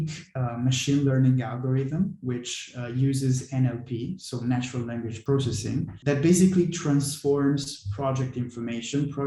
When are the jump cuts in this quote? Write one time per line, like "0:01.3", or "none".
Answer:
0:01.0
0:05.3